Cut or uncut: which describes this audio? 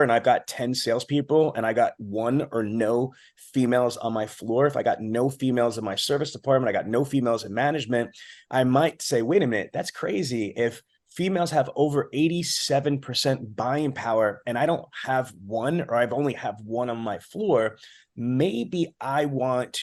uncut